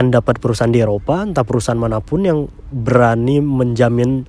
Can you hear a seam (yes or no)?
no